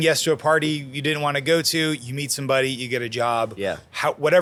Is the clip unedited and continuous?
yes; 0 cuts

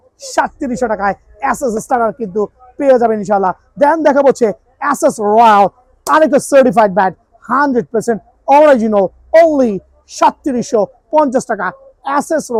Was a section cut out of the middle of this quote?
no; 0 cuts

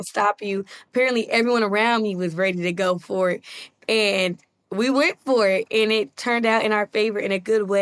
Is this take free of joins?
yes; 0 cuts

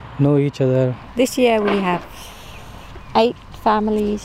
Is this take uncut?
no; 1 cut; at 1.0 s

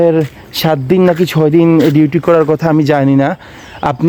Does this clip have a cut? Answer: no; 0 cuts

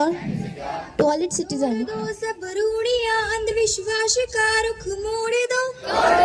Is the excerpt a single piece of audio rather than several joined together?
no; 1 cut; at 2.1 s

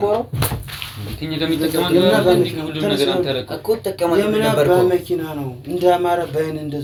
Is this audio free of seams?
yes; 0 cuts

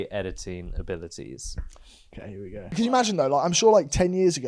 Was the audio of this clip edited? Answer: yes; 1 cut; at 2.7 s

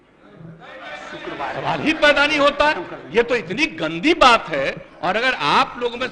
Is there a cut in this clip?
no; 0 cuts

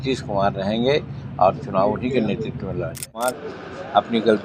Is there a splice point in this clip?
yes; 1 cut; at 3.2 s

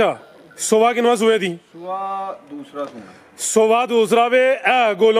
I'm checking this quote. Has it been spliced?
no; 0 cuts

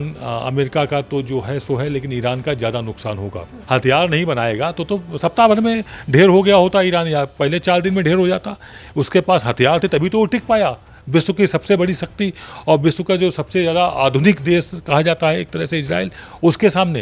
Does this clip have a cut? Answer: yes; 1 cut; at 3.5 s

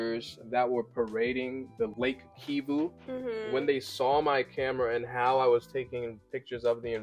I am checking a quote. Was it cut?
no; 0 cuts

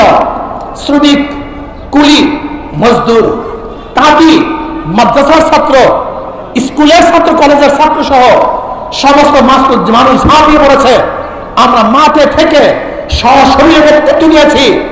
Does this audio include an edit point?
no; 0 cuts

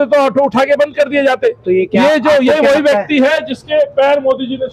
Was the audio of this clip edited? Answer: no; 0 cuts

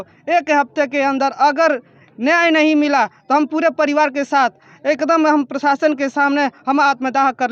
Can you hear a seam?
no; 0 cuts

